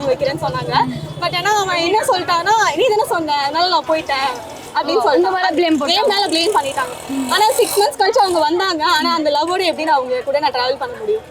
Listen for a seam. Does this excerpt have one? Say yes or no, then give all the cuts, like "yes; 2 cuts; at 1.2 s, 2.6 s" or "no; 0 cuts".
no; 0 cuts